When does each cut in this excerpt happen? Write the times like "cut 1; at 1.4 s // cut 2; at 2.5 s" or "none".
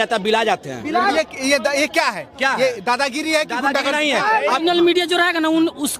cut 1; at 1.1 s // cut 2; at 4.6 s